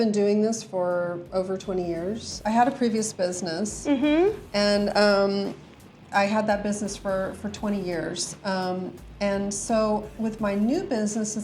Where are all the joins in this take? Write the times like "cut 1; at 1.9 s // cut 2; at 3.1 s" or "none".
cut 1; at 2.4 s // cut 2; at 8.3 s